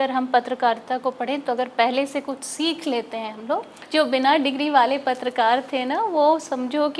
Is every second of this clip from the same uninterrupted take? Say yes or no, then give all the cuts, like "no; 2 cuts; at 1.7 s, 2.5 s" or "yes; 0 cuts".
no; 1 cut; at 3.8 s